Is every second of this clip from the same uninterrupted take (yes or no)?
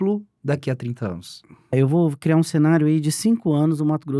no